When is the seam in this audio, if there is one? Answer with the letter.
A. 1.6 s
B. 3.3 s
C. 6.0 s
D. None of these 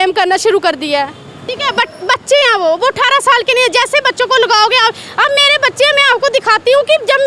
A